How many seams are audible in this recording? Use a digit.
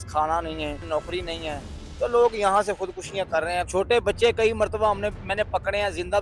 2